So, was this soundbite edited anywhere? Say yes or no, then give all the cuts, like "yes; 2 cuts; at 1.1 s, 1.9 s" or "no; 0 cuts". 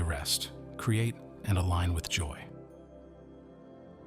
yes; 1 cut; at 2.3 s